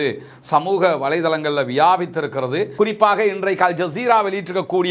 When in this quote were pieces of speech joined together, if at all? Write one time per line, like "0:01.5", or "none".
0:02.7